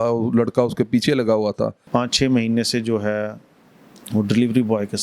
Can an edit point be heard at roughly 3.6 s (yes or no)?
no